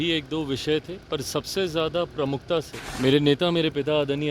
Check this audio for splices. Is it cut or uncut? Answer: cut